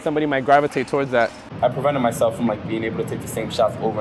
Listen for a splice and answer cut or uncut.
cut